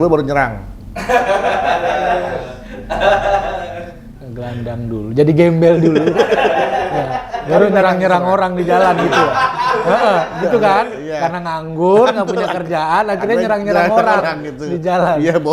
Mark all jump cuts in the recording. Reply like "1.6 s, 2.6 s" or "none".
none